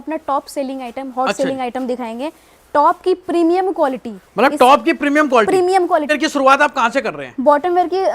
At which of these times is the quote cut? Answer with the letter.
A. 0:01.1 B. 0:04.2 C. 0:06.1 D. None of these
C